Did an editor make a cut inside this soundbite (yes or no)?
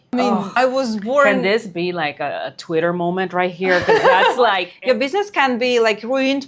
yes